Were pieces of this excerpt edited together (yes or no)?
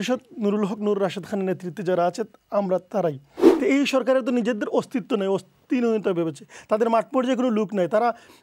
yes